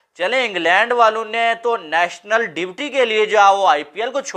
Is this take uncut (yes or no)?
yes